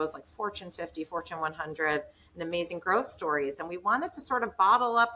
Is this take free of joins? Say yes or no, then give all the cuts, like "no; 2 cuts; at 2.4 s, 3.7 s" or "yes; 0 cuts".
yes; 0 cuts